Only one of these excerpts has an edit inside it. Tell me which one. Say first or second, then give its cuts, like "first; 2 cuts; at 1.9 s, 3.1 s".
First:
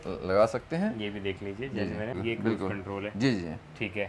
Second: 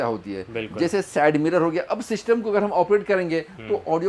first; 1 cut; at 2.2 s